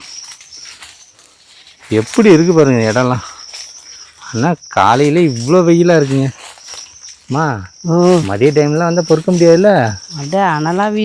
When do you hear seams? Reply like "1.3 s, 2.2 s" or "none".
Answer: none